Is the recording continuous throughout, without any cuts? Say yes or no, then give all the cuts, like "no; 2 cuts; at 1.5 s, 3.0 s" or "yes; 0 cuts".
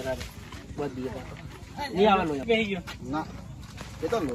no; 1 cut; at 2.4 s